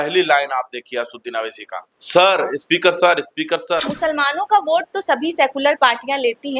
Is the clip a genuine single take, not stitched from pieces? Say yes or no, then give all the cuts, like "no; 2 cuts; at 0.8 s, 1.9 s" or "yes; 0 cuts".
no; 1 cut; at 3.8 s